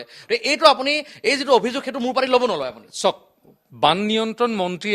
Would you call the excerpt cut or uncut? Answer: uncut